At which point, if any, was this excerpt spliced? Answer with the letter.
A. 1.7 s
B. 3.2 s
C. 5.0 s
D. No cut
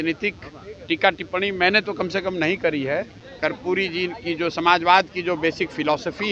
B